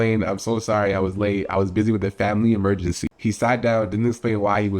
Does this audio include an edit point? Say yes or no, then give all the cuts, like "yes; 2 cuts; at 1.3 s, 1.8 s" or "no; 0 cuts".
yes; 1 cut; at 3.1 s